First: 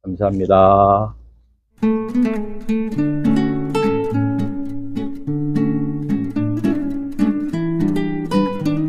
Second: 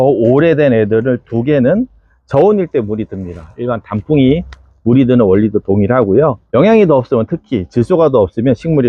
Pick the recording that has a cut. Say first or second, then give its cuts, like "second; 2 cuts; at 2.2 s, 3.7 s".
second; 2 cuts; at 2.3 s, 6.4 s